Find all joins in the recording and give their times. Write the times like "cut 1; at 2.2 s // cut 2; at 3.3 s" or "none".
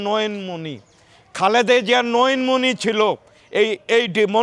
none